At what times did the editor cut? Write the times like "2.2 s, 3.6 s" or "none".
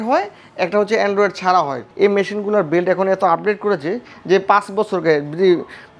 1.8 s